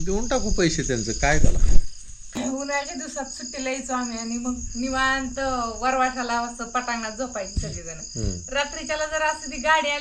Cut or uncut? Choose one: cut